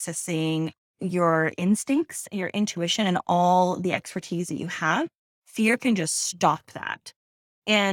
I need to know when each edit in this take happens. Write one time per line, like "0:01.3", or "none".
none